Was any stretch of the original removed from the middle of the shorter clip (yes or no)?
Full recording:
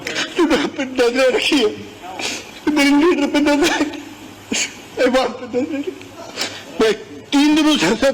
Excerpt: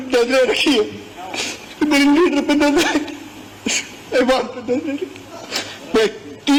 no